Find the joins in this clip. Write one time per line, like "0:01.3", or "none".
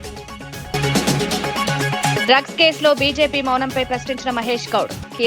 0:00.7
0:02.2